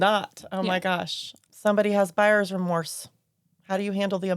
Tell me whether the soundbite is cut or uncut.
cut